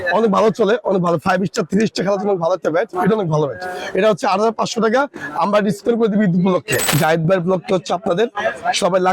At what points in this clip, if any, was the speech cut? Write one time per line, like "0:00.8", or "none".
0:06.9